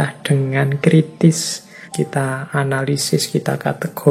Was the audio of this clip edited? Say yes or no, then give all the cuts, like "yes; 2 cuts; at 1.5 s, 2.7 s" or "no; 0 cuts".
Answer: yes; 1 cut; at 1.9 s